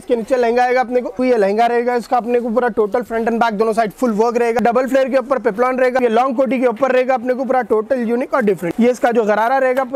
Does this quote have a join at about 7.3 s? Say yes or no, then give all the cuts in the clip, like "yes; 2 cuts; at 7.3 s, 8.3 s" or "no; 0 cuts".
no; 4 cuts; at 1.2 s, 4.6 s, 6.0 s, 8.7 s